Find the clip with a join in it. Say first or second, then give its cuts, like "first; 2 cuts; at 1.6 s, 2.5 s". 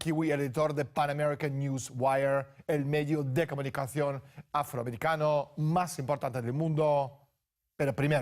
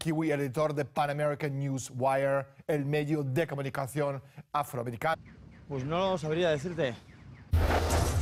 first; 1 cut; at 5.2 s